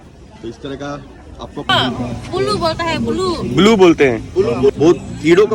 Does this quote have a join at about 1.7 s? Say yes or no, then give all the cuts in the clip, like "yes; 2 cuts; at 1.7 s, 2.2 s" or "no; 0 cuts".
yes; 1 cut; at 1.7 s